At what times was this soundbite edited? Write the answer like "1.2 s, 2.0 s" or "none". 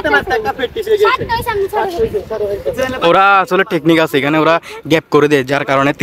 none